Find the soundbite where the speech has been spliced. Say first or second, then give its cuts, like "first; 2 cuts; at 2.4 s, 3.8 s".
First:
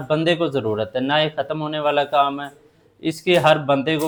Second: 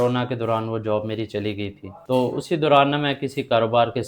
second; 1 cut; at 1.9 s